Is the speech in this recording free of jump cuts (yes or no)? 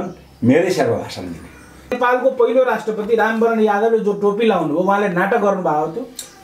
no